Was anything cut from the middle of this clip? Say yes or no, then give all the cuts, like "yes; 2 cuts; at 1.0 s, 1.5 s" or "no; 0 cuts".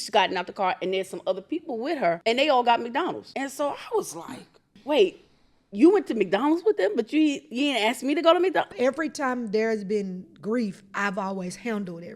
yes; 4 cuts; at 2.2 s, 3.2 s, 4.7 s, 8.7 s